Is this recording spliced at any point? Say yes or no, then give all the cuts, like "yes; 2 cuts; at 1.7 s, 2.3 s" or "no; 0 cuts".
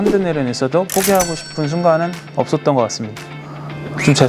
no; 0 cuts